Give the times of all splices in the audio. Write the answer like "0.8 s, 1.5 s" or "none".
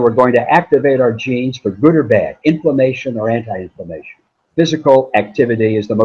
4.4 s